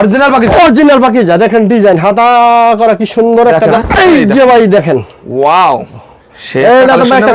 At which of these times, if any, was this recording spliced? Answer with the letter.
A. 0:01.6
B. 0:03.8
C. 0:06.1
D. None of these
B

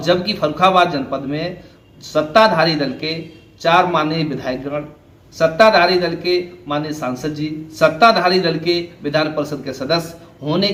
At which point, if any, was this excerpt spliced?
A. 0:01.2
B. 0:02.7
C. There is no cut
C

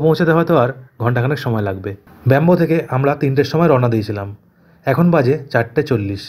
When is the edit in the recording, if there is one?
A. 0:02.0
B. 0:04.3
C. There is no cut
A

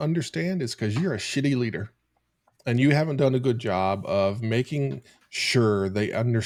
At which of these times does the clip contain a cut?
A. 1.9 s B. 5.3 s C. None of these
C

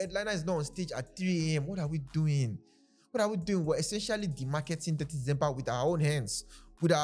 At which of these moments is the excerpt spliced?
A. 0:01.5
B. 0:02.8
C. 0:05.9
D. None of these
D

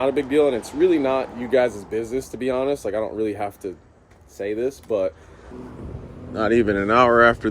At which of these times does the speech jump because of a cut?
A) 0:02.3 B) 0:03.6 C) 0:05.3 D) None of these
C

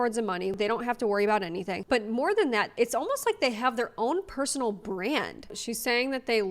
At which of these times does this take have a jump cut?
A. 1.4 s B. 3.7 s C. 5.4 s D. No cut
C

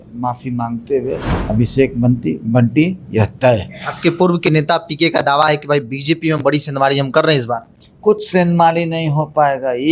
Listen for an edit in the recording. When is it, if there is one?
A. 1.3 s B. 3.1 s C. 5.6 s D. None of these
A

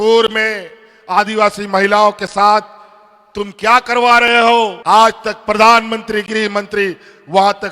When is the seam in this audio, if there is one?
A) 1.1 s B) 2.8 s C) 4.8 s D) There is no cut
C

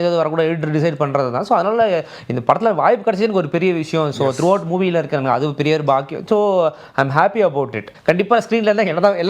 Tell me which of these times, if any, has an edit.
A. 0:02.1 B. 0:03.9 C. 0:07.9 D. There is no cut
C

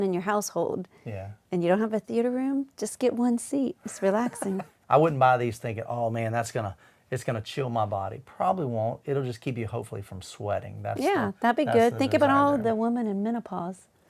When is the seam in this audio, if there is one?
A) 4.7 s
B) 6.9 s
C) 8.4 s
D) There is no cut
A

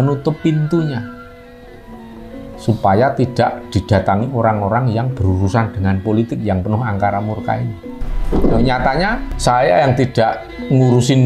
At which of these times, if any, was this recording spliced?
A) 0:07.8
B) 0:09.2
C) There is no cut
A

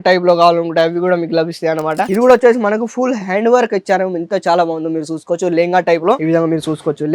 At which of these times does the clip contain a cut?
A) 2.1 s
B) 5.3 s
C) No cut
A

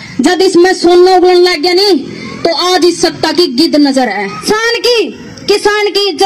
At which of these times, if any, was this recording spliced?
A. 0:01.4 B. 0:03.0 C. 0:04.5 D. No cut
C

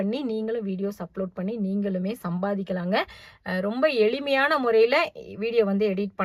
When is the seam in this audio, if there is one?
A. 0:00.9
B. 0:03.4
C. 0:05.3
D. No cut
D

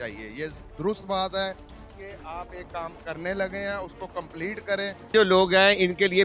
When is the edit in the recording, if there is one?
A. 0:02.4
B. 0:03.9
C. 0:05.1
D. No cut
C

